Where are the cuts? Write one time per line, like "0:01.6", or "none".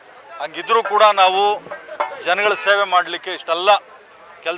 none